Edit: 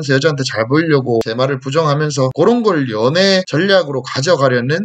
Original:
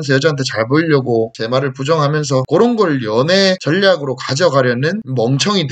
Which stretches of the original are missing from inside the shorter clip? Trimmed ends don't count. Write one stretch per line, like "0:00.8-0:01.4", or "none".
0:01.3-0:01.4